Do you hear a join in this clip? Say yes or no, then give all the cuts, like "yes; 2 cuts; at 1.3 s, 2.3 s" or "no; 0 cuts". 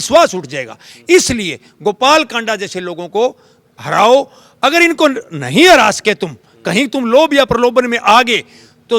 no; 0 cuts